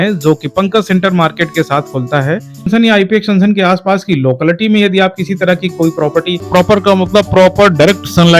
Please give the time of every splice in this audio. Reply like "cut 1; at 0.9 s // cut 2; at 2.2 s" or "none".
cut 1; at 2.7 s // cut 2; at 6.4 s